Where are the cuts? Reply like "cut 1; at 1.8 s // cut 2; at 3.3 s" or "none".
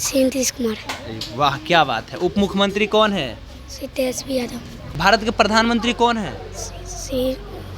cut 1; at 4.9 s